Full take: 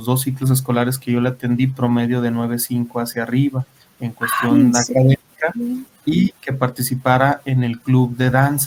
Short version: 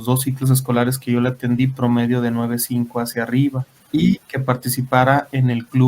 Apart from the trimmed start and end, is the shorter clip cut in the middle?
yes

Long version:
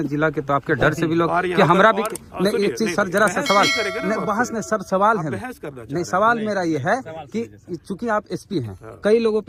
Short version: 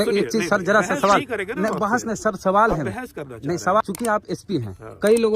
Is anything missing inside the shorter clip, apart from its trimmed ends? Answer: yes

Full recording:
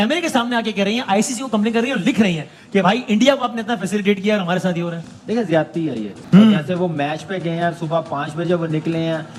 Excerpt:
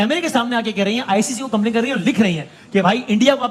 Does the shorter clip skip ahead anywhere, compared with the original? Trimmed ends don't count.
no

